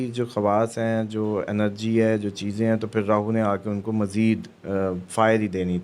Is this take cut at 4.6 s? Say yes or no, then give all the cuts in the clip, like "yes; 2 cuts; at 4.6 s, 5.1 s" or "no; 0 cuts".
no; 0 cuts